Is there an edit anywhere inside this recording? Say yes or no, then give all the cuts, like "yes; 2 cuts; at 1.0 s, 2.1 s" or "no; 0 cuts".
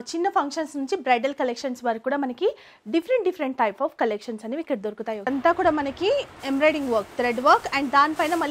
yes; 1 cut; at 5.3 s